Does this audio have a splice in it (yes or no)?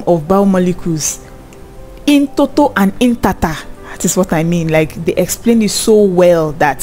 no